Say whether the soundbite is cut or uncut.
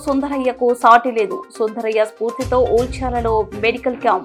uncut